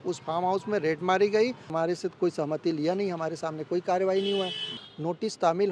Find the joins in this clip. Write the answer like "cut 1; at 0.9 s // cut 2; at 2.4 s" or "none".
cut 1; at 1.7 s // cut 2; at 4.7 s